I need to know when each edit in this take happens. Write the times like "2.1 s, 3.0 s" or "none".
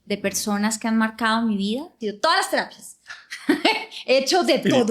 2.1 s